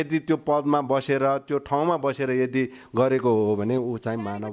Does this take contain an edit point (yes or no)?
no